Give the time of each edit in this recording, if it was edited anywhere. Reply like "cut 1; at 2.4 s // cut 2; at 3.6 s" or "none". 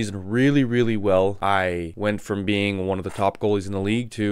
cut 1; at 1.4 s